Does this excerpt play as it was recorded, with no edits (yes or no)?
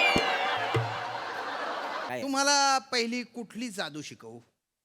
no